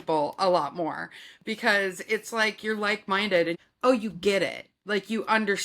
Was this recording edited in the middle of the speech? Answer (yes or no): yes